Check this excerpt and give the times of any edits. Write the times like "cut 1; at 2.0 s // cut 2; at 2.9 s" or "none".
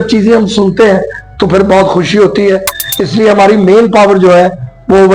none